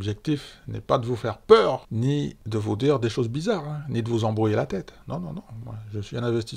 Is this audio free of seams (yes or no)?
yes